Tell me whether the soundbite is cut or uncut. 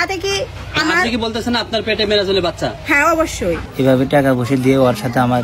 cut